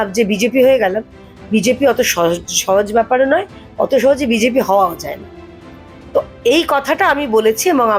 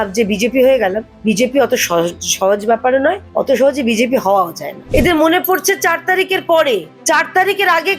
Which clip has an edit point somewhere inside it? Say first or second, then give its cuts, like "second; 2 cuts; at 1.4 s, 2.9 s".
second; 4 cuts; at 1.1 s, 3.2 s, 4.7 s, 6.9 s